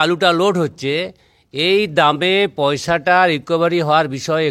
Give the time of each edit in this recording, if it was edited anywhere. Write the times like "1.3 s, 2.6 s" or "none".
none